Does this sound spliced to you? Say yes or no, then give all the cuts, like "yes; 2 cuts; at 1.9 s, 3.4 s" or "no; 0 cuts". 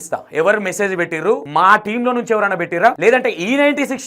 yes; 2 cuts; at 1.4 s, 3.0 s